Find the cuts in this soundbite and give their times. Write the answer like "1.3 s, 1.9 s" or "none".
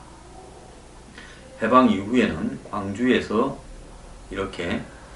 3.6 s